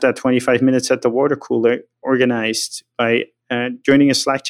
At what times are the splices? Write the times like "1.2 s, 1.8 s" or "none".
3.4 s